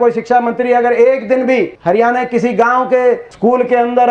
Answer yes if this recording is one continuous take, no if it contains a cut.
no